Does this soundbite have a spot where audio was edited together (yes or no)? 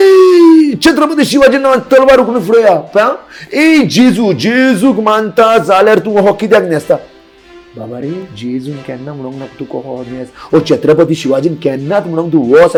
no